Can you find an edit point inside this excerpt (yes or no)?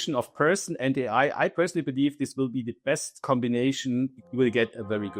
yes